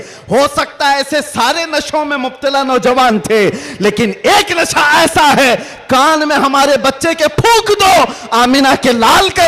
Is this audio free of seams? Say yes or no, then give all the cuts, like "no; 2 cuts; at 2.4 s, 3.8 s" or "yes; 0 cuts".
yes; 0 cuts